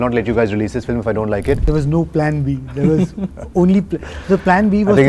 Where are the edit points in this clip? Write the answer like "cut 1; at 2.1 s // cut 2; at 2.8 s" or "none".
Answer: cut 1; at 1.6 s